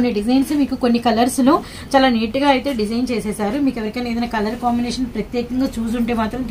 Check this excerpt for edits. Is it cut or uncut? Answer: uncut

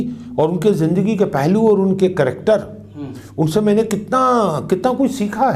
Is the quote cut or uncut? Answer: uncut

